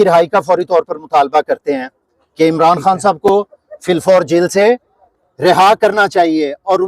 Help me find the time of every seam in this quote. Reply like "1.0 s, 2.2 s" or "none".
none